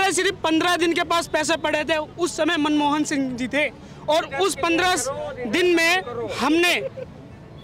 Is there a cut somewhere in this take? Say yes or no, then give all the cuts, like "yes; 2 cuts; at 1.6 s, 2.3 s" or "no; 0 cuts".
no; 0 cuts